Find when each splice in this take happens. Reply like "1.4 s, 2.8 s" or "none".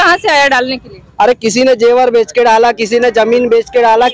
none